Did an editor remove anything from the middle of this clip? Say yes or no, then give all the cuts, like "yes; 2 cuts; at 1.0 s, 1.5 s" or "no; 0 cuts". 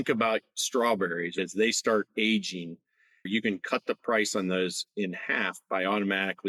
no; 0 cuts